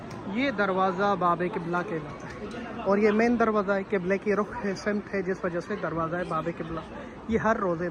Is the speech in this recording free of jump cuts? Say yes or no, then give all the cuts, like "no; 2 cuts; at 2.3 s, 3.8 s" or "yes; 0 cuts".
yes; 0 cuts